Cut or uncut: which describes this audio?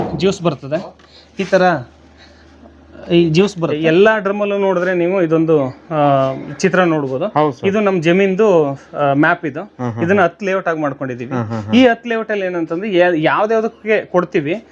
cut